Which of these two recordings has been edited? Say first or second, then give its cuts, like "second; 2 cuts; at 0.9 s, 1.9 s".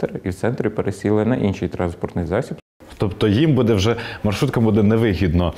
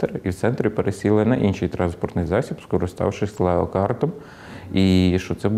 first; 1 cut; at 2.6 s